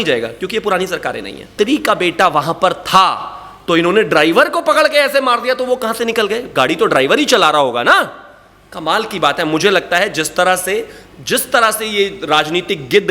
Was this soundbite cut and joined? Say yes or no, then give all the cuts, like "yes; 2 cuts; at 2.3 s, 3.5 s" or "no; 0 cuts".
yes; 1 cut; at 1.5 s